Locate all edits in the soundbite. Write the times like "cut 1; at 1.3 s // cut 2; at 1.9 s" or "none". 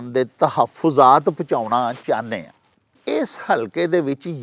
cut 1; at 3.0 s